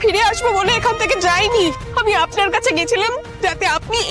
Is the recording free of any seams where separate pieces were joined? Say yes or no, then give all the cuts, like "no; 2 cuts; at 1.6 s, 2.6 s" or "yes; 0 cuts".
no; 1 cut; at 1.8 s